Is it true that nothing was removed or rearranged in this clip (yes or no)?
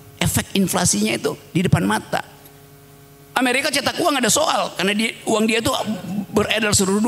yes